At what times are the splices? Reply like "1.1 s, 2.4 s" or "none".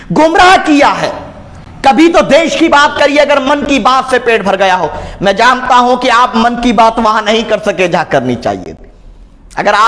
none